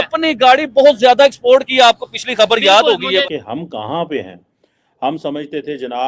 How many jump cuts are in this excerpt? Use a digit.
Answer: 1